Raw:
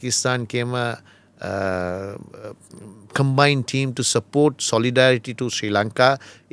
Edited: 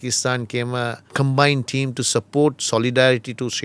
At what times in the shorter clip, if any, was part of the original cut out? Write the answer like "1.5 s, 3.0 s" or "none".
1.0 s